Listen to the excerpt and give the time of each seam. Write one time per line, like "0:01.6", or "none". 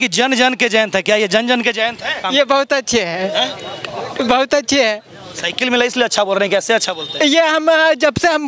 0:02.2